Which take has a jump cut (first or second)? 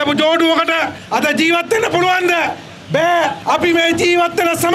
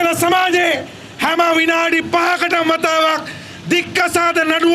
first